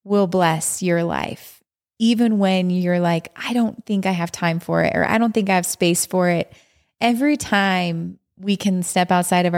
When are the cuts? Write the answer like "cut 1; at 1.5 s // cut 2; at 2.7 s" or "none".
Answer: none